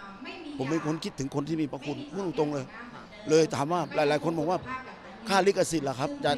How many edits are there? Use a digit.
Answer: 0